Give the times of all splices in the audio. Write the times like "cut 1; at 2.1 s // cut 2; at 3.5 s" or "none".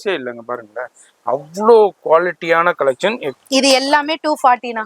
cut 1; at 3.3 s